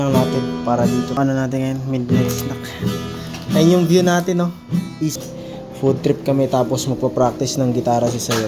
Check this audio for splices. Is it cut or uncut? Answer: cut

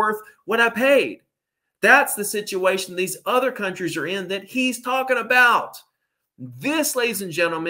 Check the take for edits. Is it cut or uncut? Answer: uncut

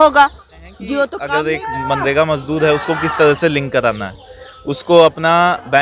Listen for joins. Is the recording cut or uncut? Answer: cut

